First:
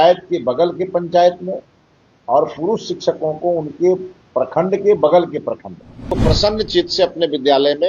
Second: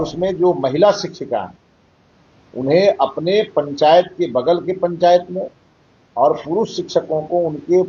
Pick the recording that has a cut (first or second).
first